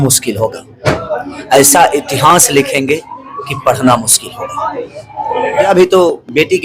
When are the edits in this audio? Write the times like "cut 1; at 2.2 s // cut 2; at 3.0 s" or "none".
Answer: cut 1; at 5.7 s